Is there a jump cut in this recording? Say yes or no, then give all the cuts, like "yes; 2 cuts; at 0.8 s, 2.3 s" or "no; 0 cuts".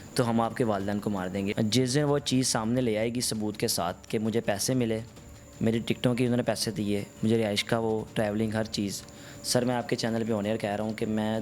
yes; 1 cut; at 1.5 s